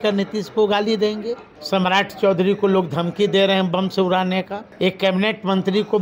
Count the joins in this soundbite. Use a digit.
2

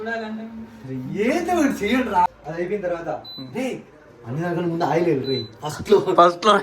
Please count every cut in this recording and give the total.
1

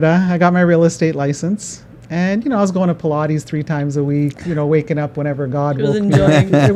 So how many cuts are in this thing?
0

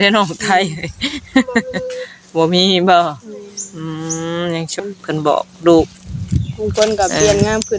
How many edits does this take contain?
1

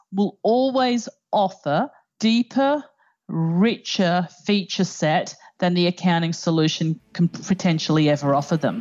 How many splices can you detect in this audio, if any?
1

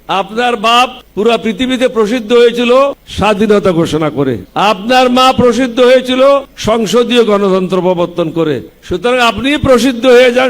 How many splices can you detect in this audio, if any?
5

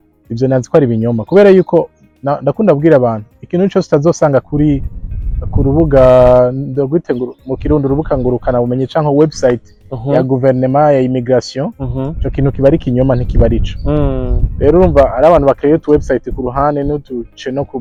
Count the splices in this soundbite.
0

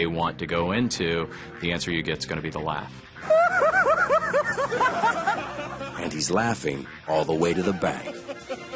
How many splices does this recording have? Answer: 1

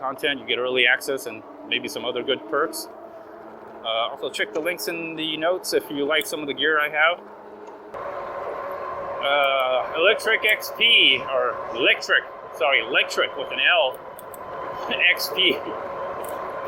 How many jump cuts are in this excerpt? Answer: 1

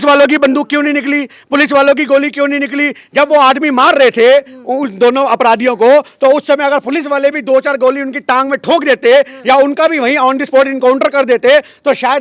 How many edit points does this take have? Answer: 0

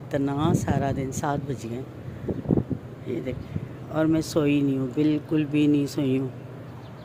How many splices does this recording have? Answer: 0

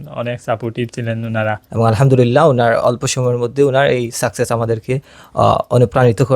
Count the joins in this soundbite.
1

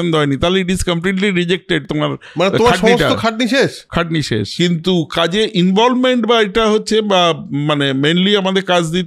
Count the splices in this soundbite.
1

